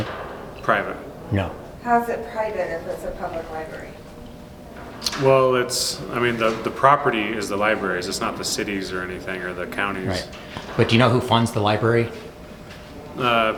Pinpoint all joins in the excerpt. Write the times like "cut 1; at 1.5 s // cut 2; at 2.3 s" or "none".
none